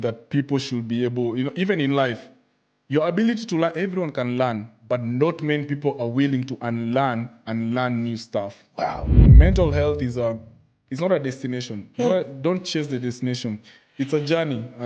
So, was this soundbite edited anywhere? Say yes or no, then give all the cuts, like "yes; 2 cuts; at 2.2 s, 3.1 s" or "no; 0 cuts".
yes; 1 cut; at 9.2 s